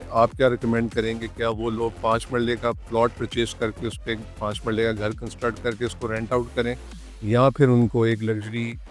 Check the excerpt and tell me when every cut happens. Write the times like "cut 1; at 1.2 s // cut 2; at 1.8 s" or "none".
none